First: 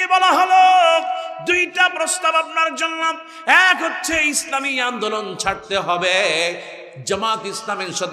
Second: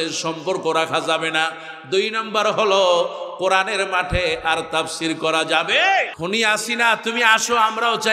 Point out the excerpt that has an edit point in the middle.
second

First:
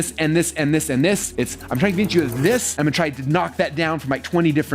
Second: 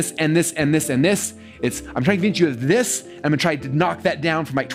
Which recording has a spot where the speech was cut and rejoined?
first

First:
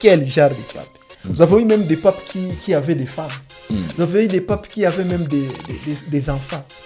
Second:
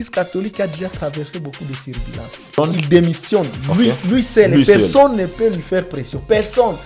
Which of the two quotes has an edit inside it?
second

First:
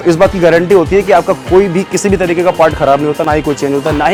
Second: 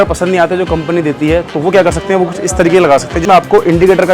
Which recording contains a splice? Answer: second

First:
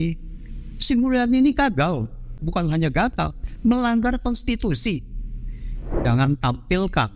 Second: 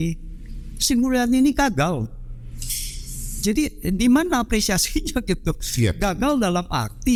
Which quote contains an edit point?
first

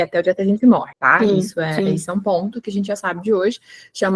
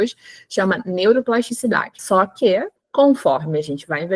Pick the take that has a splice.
second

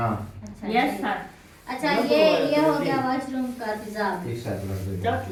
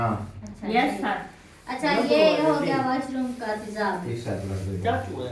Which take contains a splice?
second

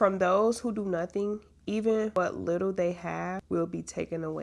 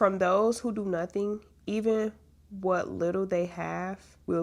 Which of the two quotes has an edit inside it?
first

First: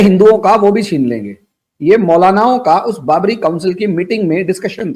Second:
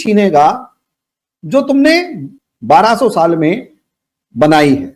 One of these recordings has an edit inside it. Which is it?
second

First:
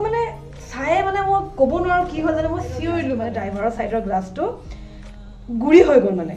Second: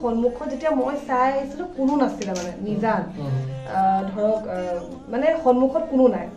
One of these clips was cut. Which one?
first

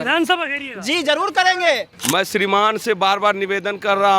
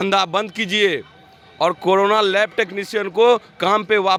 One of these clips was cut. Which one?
first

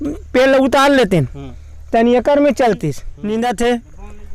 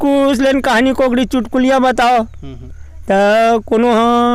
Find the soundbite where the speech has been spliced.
first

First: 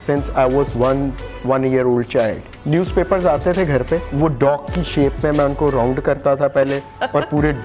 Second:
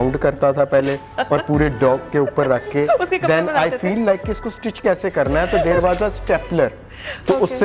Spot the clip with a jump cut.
first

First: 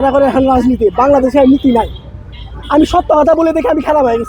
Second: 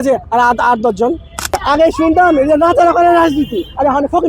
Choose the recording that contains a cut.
second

